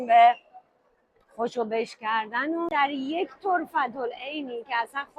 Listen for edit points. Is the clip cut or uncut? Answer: cut